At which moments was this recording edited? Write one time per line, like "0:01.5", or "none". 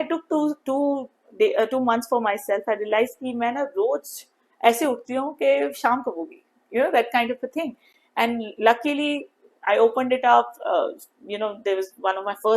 none